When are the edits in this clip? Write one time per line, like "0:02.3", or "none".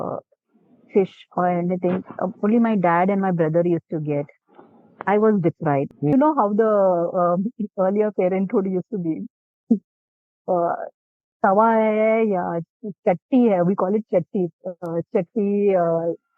0:06.1